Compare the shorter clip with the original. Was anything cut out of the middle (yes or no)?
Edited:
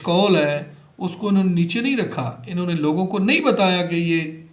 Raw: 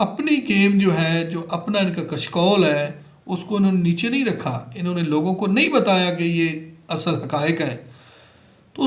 no